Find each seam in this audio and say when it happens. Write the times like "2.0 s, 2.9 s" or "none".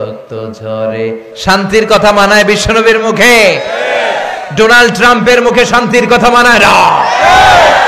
1.3 s